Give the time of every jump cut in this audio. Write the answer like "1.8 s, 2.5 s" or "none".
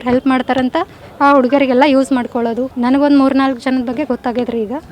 2.7 s